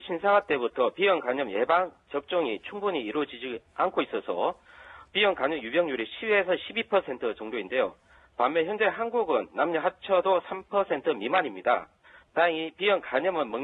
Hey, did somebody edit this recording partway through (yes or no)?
no